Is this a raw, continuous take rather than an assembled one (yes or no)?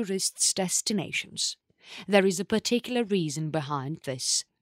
yes